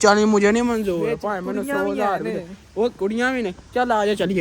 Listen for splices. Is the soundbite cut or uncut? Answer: uncut